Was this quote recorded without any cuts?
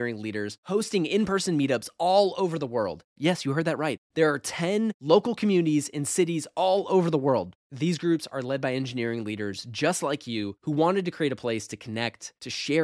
yes; 0 cuts

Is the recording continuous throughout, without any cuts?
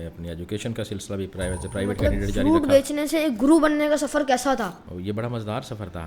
no; 1 cut; at 4.9 s

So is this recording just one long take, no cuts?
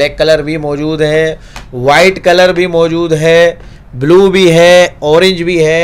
yes; 0 cuts

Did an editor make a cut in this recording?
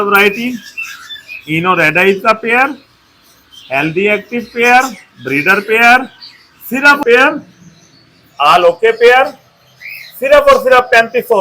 yes; 1 cut; at 7.0 s

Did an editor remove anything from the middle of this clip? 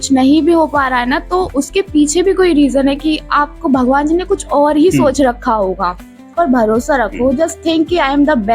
yes; 1 cut; at 6.3 s

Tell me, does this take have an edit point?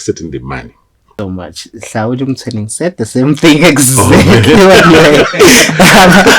yes; 1 cut; at 1.1 s

